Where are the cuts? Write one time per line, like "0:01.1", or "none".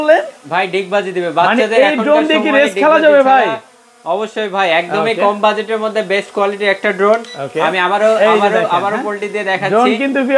none